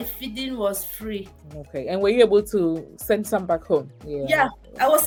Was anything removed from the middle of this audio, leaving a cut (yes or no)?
no